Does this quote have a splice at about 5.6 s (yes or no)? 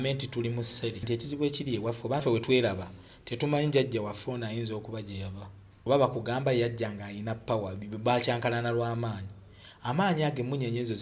yes